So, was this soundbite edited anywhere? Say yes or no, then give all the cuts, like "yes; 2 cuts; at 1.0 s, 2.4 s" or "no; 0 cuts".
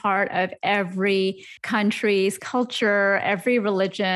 yes; 1 cut; at 1.5 s